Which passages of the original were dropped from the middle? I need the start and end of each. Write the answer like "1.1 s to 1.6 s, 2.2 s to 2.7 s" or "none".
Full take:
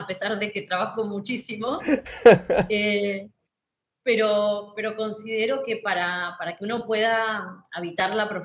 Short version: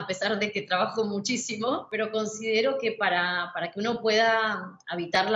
1.8 s to 4.6 s

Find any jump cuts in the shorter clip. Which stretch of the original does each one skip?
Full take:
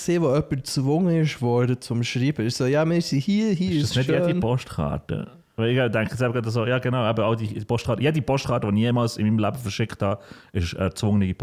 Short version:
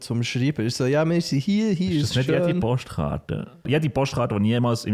5.5 s to 8.0 s

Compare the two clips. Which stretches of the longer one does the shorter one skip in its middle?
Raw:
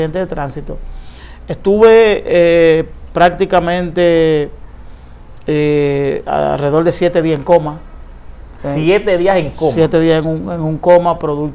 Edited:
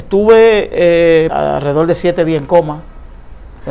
2.9 s to 6.3 s

